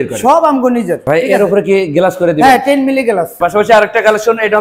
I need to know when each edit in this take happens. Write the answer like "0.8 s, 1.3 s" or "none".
1.0 s, 3.4 s

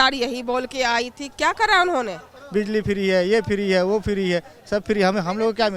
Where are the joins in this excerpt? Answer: 2.3 s

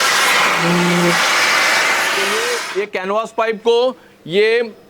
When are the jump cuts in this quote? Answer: 2.4 s

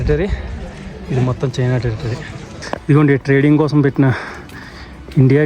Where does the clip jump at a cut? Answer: 2.7 s

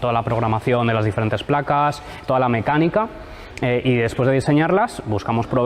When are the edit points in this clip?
none

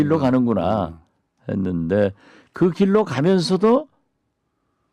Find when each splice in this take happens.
2.1 s

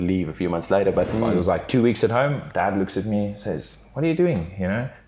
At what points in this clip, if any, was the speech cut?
1.1 s

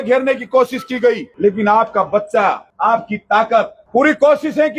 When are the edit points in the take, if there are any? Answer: 1.3 s, 2.7 s, 3.8 s

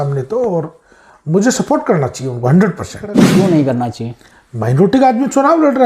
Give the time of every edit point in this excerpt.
3.3 s

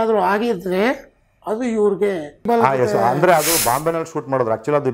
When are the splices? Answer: 2.4 s

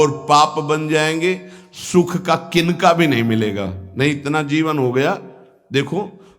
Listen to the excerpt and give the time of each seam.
none

